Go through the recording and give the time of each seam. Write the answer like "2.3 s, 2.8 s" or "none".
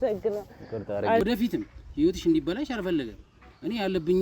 1.2 s